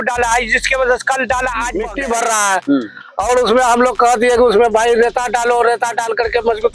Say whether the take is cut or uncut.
cut